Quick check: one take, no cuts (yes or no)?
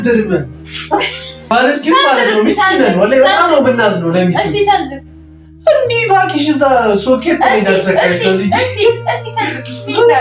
no